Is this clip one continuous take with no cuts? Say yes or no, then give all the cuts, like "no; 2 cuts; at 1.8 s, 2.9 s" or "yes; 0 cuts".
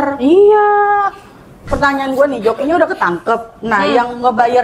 no; 1 cut; at 1.6 s